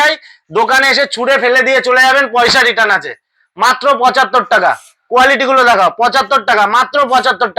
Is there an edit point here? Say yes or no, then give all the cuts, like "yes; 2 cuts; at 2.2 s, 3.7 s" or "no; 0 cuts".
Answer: no; 0 cuts